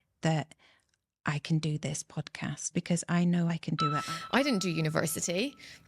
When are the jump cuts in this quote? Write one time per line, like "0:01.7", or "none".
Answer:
0:04.0